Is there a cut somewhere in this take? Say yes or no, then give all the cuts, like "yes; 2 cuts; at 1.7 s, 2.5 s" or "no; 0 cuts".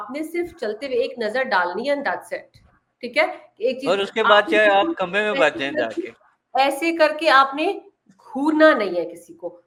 no; 0 cuts